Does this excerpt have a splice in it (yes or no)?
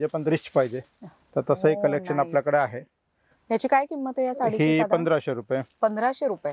no